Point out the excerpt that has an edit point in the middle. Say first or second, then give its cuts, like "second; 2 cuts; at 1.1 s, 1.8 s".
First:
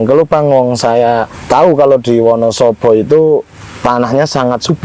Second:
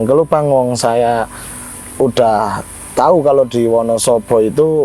first; 1 cut; at 1.3 s